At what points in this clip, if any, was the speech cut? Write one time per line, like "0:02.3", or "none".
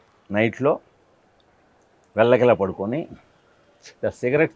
none